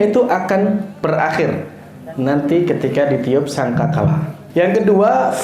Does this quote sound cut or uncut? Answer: cut